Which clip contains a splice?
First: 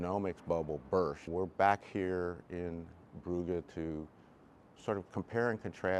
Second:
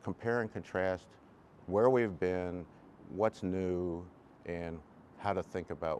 first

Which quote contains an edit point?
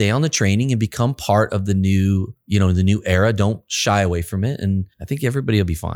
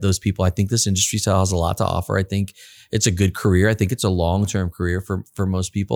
first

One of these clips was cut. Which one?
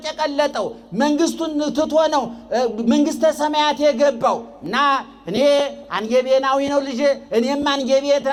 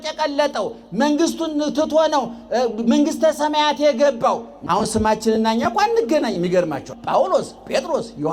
second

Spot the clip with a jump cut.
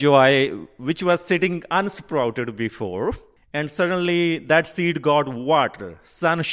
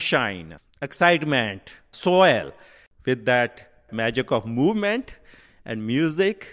second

